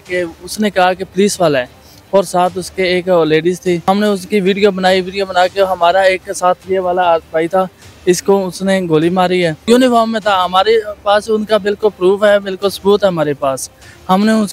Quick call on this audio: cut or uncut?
cut